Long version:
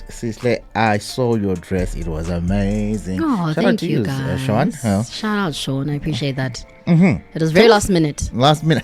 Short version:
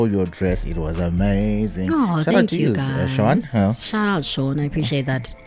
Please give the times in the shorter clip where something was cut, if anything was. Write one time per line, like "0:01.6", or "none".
none